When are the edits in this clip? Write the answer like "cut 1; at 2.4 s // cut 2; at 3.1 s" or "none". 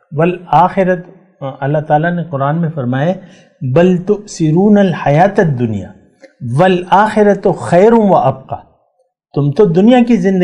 none